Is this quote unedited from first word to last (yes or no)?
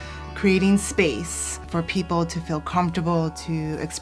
no